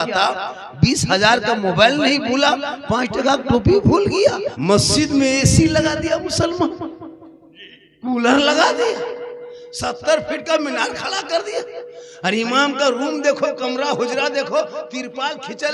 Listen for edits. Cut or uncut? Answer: cut